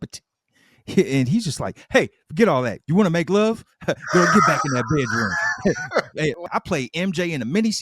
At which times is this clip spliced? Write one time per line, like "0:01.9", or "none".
0:06.4